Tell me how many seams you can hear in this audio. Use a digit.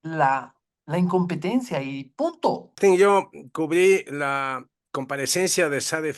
1